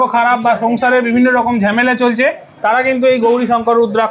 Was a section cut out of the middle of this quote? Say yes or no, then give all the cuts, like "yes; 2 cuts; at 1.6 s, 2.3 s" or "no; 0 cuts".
no; 0 cuts